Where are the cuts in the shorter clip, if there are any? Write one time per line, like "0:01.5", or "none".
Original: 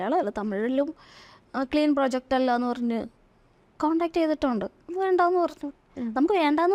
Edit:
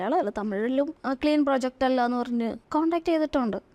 0:01.0
0:02.6